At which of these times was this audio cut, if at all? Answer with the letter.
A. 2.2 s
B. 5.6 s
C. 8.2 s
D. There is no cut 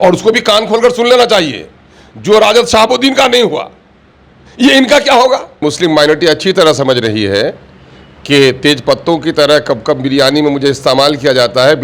B